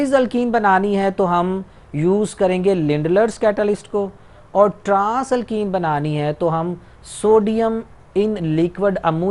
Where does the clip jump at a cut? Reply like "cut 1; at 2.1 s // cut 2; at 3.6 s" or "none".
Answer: none